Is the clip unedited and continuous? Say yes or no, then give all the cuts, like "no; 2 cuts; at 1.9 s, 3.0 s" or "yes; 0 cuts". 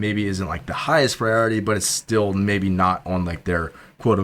yes; 0 cuts